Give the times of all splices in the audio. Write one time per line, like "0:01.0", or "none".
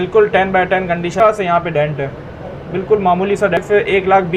0:01.2
0:03.6